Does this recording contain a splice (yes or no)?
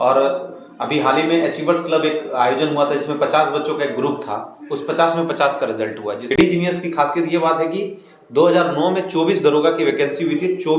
yes